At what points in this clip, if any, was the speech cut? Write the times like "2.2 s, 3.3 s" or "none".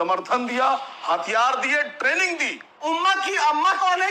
2.7 s